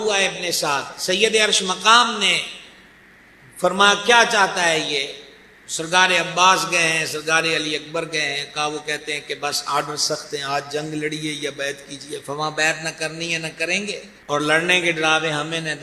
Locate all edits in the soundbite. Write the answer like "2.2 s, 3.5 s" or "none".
14.1 s